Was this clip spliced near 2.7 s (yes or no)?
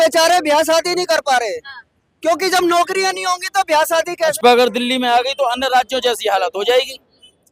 no